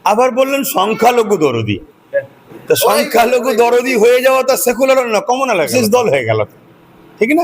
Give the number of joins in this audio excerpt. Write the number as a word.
one